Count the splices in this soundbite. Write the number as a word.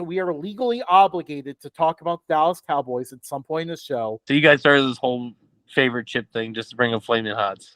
one